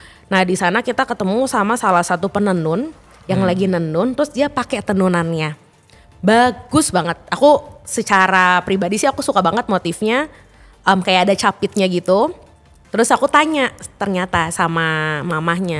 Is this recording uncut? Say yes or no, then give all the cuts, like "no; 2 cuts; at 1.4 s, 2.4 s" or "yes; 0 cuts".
yes; 0 cuts